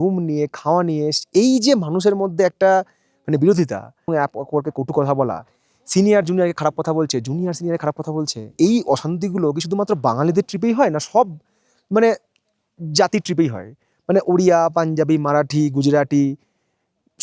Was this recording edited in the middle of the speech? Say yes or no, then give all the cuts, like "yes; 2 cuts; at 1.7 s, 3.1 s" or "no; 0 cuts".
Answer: no; 0 cuts